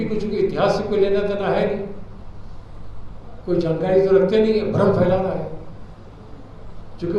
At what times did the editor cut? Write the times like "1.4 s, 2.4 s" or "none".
none